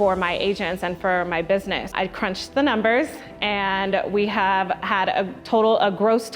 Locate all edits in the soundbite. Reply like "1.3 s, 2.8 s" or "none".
1.9 s